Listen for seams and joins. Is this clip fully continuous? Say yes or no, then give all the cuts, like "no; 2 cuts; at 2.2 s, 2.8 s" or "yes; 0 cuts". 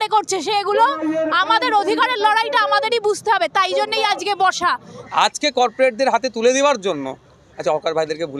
no; 1 cut; at 4.9 s